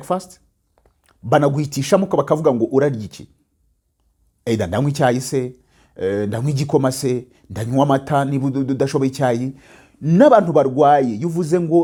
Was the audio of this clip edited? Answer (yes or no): no